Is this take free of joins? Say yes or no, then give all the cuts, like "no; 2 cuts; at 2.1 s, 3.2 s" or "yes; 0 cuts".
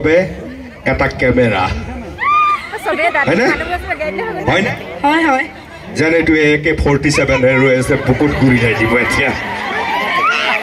yes; 0 cuts